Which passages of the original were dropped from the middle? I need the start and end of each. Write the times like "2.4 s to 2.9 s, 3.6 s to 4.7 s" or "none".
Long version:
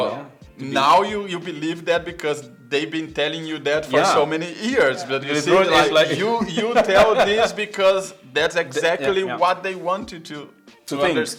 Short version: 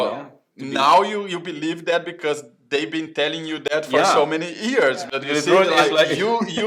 none